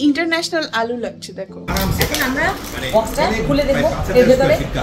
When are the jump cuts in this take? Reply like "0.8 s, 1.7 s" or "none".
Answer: 1.7 s